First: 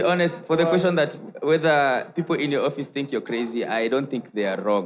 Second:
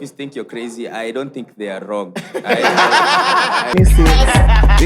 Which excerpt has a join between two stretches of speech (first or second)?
second